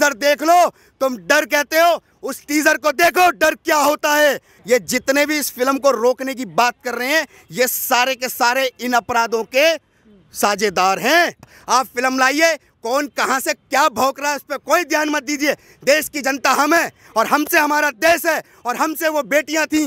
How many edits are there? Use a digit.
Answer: 2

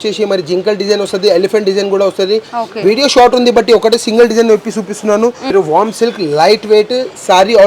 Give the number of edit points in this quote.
1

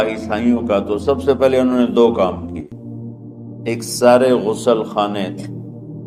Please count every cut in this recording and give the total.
0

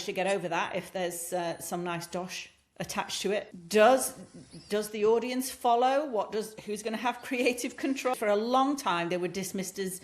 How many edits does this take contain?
2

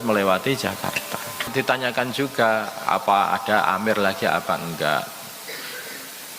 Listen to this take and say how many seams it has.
1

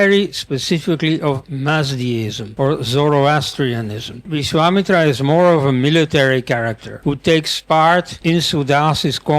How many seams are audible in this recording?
4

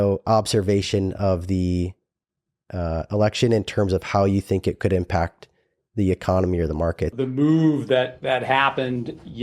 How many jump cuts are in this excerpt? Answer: 1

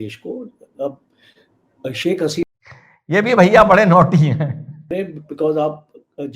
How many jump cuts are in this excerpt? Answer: 2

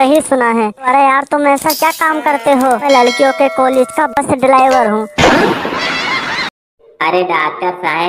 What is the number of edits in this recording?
0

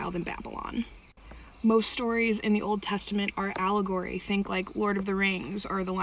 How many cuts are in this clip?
2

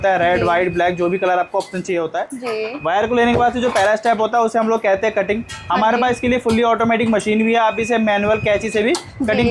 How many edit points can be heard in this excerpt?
0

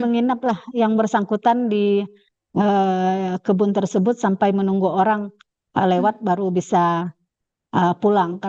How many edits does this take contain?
0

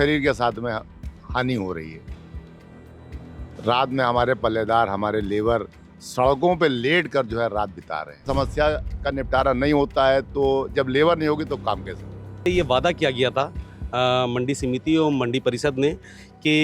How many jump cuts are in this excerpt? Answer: 2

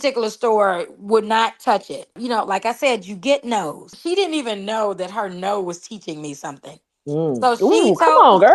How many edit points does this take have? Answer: 2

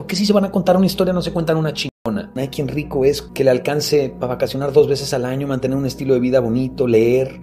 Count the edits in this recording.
2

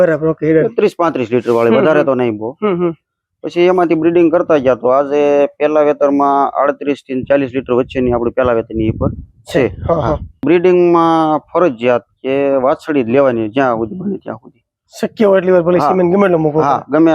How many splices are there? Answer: 1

